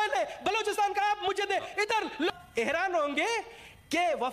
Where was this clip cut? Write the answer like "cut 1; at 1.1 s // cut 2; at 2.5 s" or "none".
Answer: cut 1; at 2.3 s